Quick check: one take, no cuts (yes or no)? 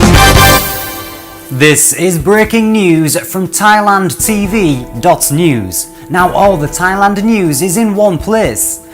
no